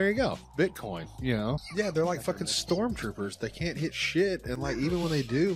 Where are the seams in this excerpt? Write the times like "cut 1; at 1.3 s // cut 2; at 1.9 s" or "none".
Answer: cut 1; at 1.6 s